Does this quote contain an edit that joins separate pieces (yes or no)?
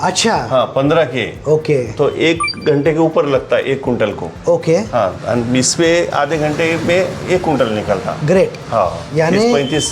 no